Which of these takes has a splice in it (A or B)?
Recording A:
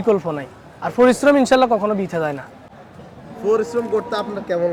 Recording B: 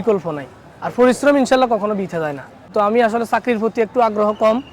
B